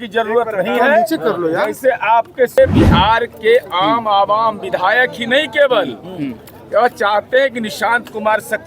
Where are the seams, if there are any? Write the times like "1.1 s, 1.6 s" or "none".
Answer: 2.6 s